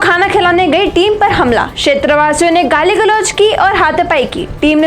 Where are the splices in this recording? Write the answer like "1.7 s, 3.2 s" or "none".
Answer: none